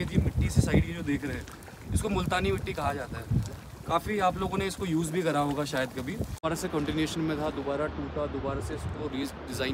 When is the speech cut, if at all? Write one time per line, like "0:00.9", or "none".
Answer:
0:06.4